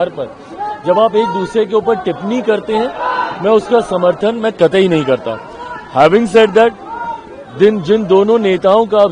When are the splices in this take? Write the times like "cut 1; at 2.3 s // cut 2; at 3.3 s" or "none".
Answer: none